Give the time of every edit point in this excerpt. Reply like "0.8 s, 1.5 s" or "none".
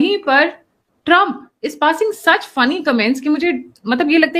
none